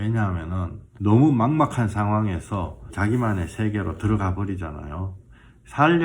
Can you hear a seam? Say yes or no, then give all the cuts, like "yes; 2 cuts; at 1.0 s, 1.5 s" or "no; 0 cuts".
yes; 2 cuts; at 0.9 s, 2.9 s